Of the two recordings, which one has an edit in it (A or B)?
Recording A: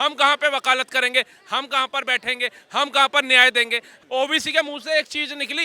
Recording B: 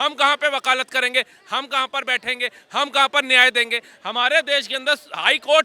A